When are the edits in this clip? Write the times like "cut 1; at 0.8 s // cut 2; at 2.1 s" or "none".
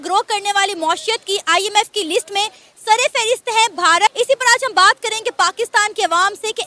none